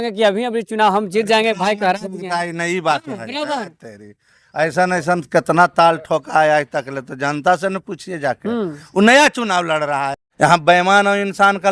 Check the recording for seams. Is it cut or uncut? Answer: cut